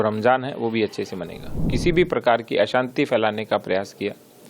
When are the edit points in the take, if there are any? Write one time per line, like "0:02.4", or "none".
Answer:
0:01.6